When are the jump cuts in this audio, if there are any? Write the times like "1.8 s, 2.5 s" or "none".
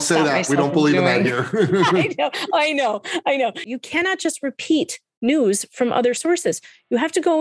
3.7 s